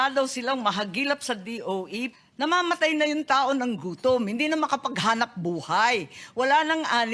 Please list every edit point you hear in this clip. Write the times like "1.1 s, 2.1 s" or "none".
2.1 s